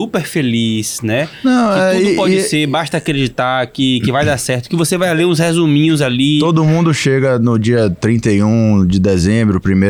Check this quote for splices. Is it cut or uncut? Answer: uncut